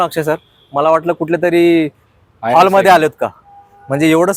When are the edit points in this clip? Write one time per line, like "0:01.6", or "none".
none